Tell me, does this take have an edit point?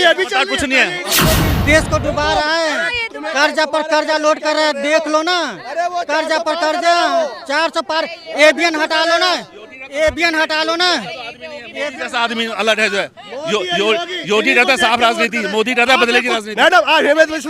yes; 1 cut; at 1.2 s

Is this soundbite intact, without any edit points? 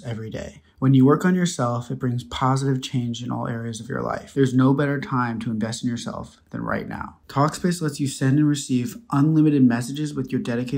no; 1 cut; at 4.2 s

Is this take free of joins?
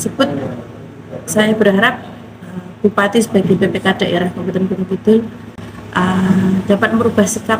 yes; 0 cuts

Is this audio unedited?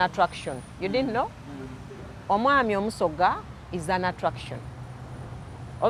yes; 0 cuts

